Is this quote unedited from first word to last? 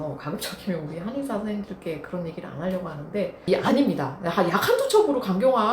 no; 1 cut; at 3.5 s

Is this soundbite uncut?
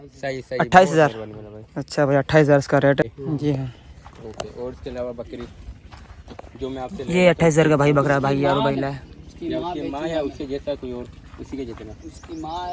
no; 1 cut; at 3.0 s

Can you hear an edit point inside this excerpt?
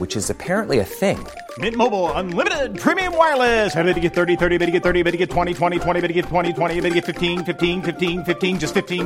no; 0 cuts

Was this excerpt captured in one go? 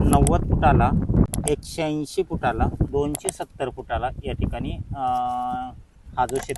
no; 2 cuts; at 1.3 s, 2.9 s

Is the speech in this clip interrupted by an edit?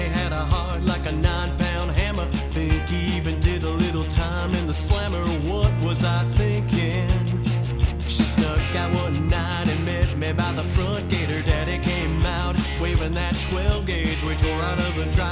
no; 0 cuts

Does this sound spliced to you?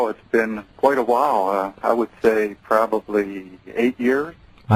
no; 0 cuts

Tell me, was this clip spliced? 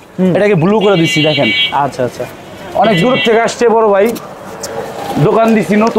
no; 0 cuts

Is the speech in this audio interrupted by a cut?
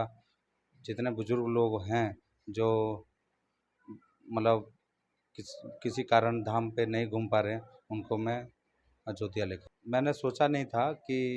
yes; 1 cut; at 9.6 s

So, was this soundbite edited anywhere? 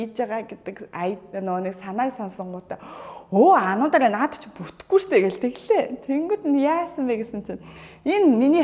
no; 0 cuts

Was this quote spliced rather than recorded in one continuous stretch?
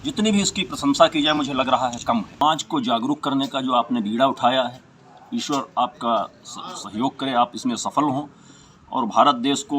yes; 2 cuts; at 1.4 s, 2.4 s

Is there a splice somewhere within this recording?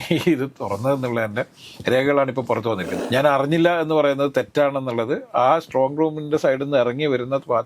yes; 1 cut; at 2.9 s

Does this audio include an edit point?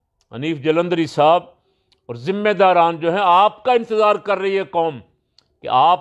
no; 0 cuts

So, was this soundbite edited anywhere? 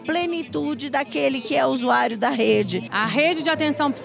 yes; 1 cut; at 2.9 s

